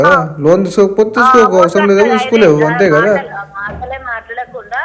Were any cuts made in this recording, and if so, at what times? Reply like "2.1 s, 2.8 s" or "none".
none